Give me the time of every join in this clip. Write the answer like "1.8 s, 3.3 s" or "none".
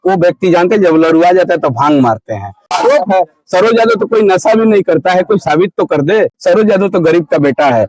2.7 s, 6.4 s